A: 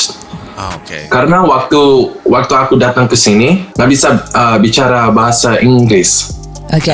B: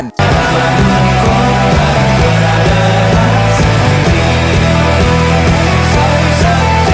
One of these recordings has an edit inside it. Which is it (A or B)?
A